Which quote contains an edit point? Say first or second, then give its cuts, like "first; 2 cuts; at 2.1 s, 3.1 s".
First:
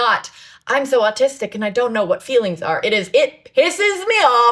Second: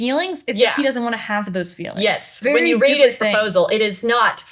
second; 1 cut; at 2.4 s